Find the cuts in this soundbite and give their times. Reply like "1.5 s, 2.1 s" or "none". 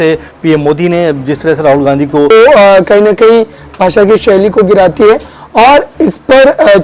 2.3 s